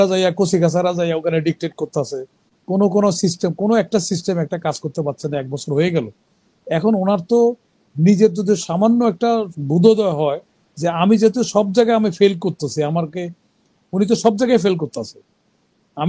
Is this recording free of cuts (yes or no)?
yes